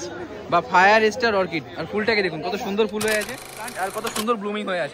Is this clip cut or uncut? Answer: cut